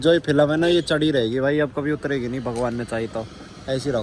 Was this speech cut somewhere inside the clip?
no; 0 cuts

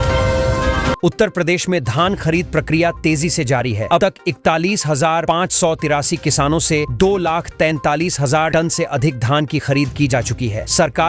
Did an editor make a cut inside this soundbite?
yes; 1 cut; at 1.0 s

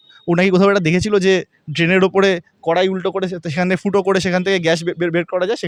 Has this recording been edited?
no; 0 cuts

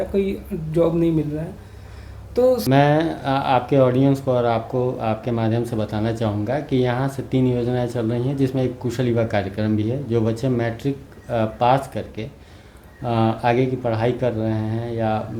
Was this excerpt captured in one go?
no; 1 cut; at 2.6 s

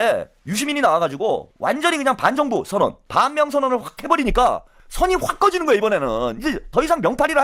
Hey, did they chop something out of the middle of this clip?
no; 0 cuts

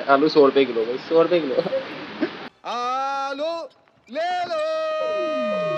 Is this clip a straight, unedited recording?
no; 1 cut; at 2.9 s

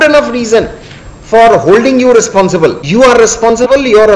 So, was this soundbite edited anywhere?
yes; 1 cut; at 2.8 s

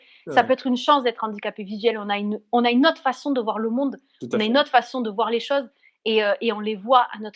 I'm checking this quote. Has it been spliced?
no; 0 cuts

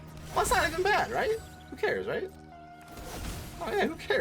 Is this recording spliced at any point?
no; 0 cuts

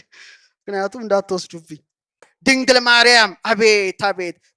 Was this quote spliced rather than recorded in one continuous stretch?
yes; 1 cut; at 2.5 s

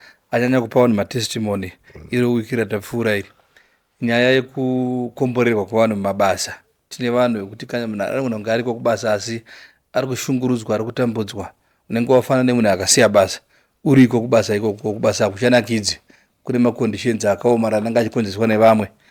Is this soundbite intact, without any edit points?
yes; 0 cuts

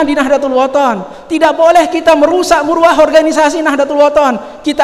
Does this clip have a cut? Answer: no; 0 cuts

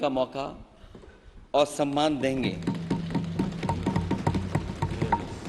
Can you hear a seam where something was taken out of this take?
no; 0 cuts

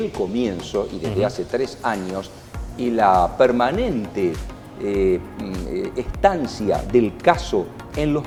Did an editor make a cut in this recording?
no; 0 cuts

